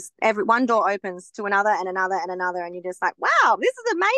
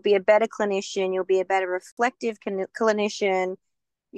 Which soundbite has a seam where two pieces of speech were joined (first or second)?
second